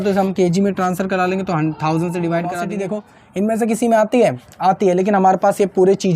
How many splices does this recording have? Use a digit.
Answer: 1